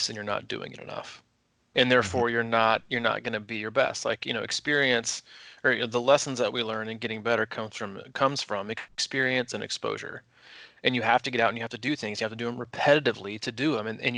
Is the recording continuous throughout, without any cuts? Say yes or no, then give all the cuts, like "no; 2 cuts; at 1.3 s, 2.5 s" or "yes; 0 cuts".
yes; 0 cuts